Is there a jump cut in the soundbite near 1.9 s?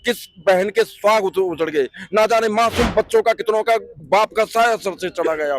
no; 1 cut; at 3.9 s

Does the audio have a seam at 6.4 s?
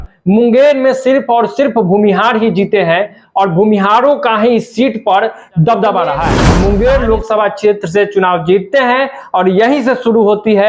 yes; 1 cut; at 6.4 s

